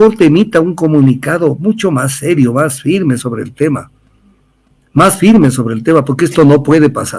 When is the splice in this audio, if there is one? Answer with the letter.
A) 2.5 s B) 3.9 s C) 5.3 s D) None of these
D